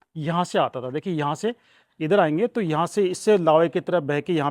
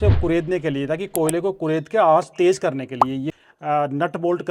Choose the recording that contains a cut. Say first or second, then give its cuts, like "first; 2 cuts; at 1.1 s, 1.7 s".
second; 1 cut; at 3.4 s